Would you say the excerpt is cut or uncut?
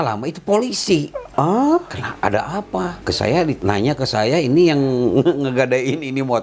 cut